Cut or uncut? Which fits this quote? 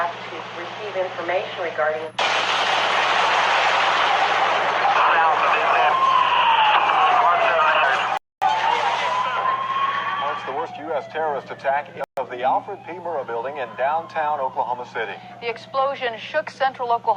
cut